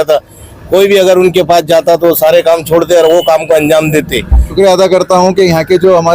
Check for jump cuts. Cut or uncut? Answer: cut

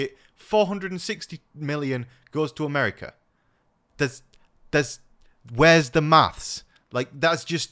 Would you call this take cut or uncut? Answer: uncut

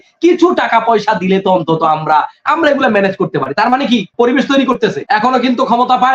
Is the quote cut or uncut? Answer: cut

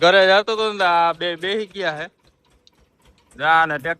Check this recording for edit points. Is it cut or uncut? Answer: uncut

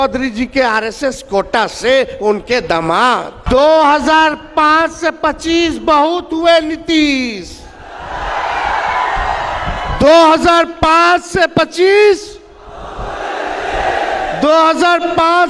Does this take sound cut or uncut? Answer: cut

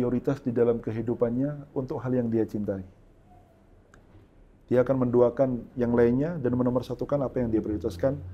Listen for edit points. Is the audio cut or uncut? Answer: uncut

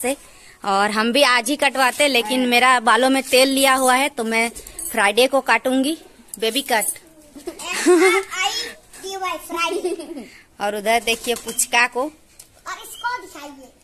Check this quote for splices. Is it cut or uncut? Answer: uncut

